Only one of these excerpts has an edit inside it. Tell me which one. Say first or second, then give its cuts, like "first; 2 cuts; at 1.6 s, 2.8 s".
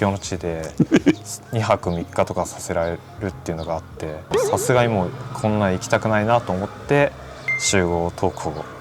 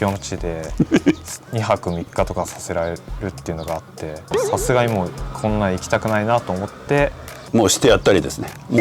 second; 1 cut; at 7.3 s